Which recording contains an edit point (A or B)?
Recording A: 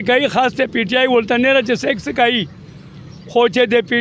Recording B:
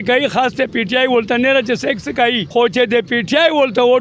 B